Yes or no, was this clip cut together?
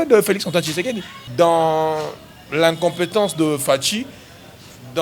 yes